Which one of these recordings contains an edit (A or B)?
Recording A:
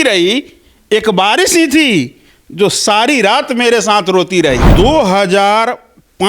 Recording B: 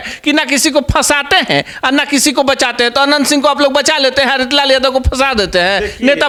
A